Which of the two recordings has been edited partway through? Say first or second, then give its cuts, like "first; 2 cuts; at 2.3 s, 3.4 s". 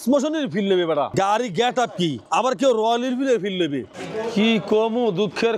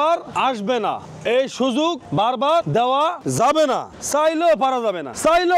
first; 3 cuts; at 1.1 s, 2.2 s, 4.0 s